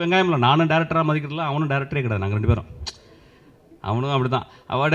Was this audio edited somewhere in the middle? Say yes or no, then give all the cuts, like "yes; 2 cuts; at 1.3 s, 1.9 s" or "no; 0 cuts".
no; 0 cuts